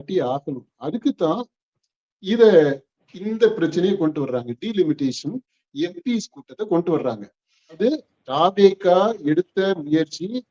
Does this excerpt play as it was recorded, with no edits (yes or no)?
no